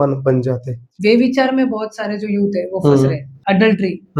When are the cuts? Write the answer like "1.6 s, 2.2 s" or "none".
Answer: 0.9 s, 3.3 s